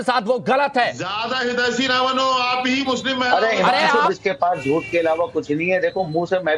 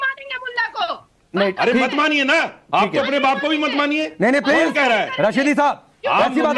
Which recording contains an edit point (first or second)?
first